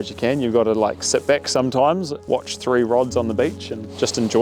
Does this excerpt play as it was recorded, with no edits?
no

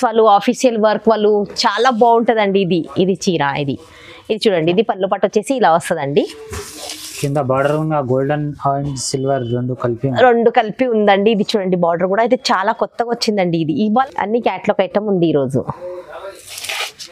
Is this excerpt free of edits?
no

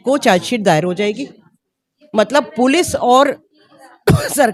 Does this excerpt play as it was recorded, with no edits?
yes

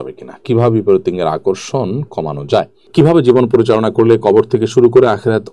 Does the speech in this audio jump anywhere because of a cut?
yes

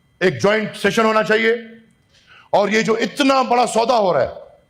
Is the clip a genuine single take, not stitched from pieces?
yes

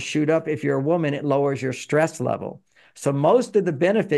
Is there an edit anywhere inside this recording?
no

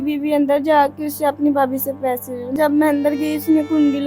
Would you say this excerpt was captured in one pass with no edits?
no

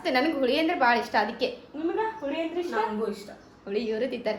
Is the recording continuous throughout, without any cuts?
yes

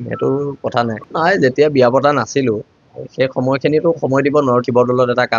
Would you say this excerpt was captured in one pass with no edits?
no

